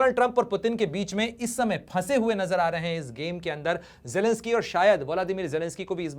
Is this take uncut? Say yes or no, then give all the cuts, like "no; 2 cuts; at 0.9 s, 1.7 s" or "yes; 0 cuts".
yes; 0 cuts